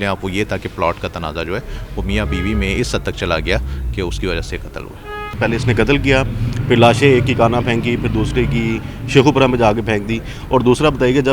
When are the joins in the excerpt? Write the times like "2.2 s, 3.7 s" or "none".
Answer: 5.4 s